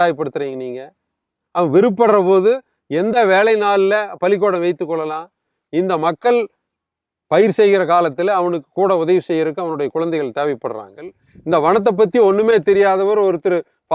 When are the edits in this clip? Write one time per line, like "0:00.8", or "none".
0:11.3